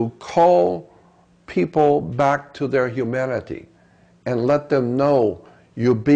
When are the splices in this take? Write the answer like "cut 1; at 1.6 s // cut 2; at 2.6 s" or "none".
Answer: none